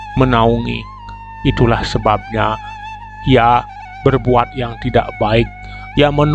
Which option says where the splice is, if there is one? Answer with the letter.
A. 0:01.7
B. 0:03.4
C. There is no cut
C